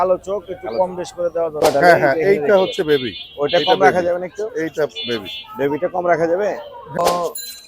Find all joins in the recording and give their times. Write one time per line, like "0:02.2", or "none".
0:01.6
0:07.0